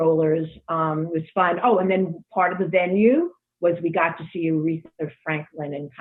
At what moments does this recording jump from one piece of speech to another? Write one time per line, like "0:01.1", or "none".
none